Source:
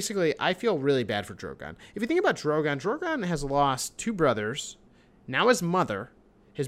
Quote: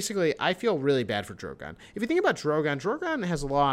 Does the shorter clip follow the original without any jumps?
yes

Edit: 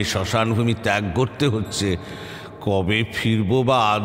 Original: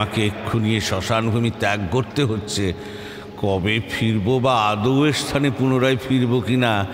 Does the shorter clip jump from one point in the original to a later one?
no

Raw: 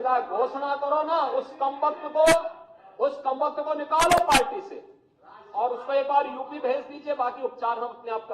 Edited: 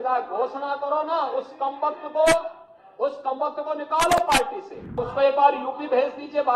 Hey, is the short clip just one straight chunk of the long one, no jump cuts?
no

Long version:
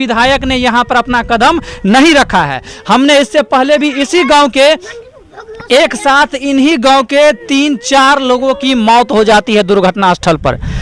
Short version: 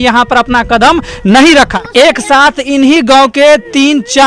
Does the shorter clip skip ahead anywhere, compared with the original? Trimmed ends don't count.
yes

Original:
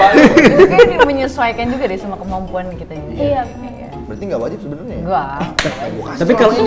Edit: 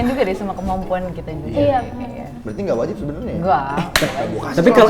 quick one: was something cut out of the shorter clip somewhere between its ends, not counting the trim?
no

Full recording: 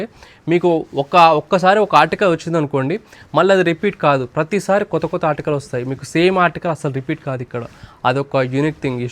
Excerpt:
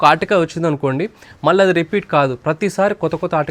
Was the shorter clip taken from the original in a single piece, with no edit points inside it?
yes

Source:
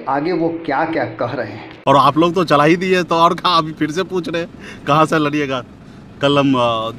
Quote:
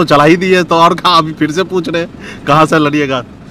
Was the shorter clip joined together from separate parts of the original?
no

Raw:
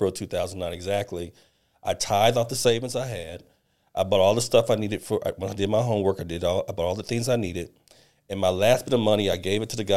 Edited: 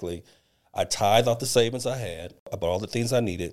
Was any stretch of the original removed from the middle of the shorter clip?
yes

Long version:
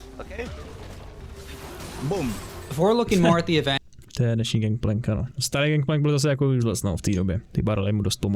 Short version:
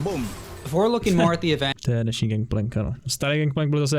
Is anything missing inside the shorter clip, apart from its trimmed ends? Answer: yes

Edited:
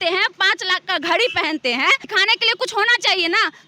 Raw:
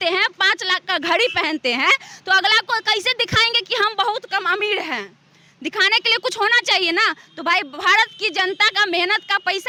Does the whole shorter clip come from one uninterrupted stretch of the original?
no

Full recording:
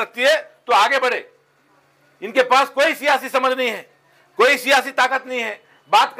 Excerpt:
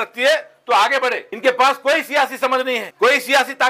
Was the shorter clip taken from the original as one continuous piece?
no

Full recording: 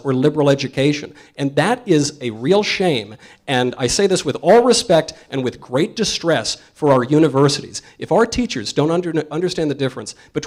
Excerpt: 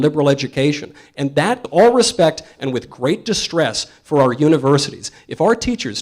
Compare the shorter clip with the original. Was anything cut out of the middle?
yes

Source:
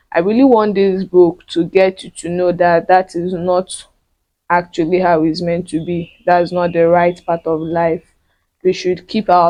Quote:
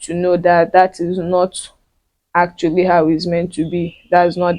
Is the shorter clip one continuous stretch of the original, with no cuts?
yes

